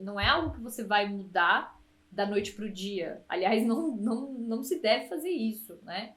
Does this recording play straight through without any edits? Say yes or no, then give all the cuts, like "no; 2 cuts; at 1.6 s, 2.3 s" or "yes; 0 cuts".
yes; 0 cuts